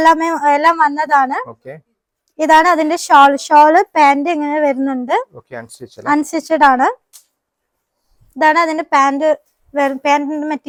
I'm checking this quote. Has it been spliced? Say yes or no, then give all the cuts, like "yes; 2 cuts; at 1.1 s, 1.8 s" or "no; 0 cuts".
no; 0 cuts